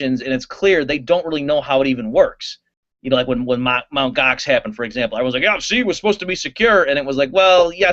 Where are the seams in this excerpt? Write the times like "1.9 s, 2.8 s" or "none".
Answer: none